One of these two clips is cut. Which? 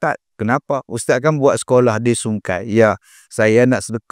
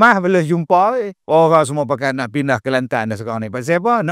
second; 1 cut; at 1.1 s

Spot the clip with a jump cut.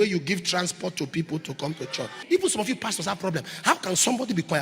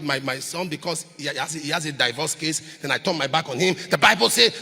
first; 1 cut; at 2.2 s

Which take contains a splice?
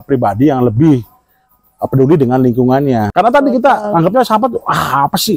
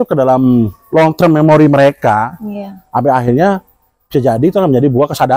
first; 1 cut; at 3.1 s

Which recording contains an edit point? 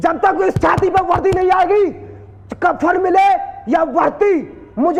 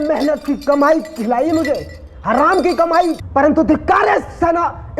second; 1 cut; at 3.2 s

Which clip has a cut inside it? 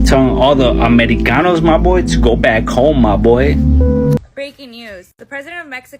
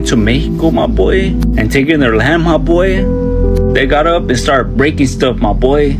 first; 1 cut; at 4.2 s

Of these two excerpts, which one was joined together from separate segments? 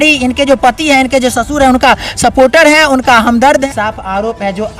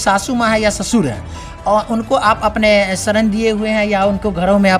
first; 1 cut; at 3.6 s

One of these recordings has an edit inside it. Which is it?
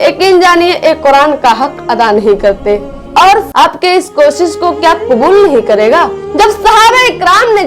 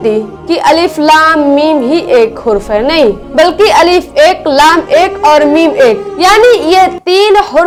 first; 1 cut; at 3.5 s

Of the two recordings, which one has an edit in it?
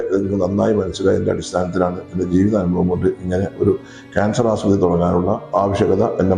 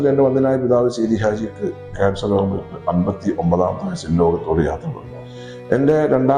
first; 1 cut; at 5.4 s

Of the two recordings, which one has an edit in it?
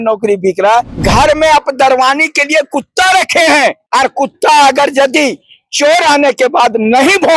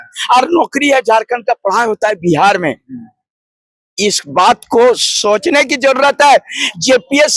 first; 2 cuts; at 1.0 s, 3.8 s

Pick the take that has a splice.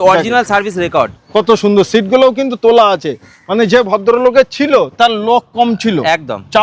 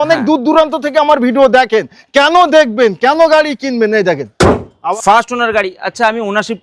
second; 1 cut; at 4.9 s

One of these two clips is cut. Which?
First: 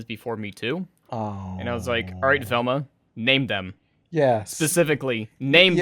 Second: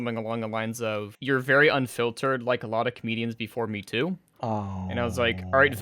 second; 1 cut; at 1.1 s

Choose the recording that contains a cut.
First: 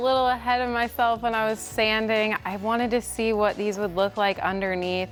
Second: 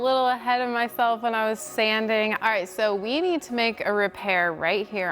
second; 1 cut; at 2.4 s

